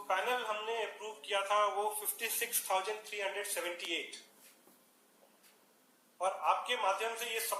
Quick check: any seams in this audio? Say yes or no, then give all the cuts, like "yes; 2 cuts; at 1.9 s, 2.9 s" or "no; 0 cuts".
no; 0 cuts